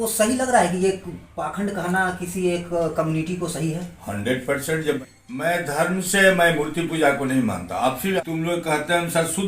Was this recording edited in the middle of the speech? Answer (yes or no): yes